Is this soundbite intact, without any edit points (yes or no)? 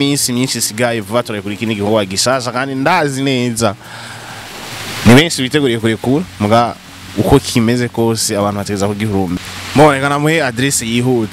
no